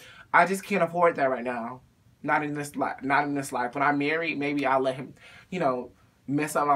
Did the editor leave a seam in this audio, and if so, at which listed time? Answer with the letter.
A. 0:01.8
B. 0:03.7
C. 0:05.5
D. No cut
D